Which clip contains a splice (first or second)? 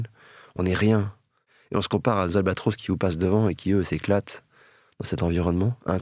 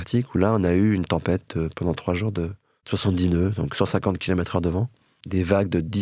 second